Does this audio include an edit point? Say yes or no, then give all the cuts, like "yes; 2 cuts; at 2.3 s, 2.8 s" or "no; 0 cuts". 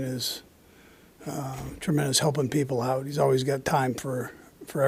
no; 0 cuts